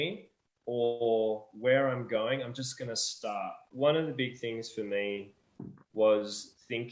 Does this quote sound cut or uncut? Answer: cut